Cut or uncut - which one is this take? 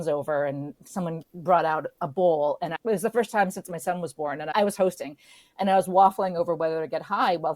cut